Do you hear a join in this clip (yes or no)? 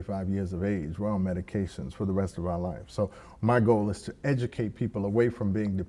no